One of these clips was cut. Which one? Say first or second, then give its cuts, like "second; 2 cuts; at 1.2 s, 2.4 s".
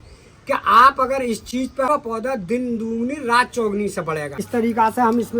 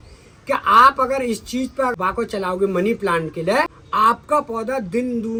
first; 2 cuts; at 1.9 s, 4.4 s